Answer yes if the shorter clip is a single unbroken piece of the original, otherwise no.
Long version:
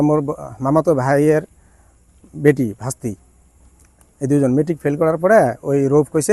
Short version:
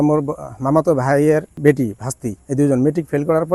no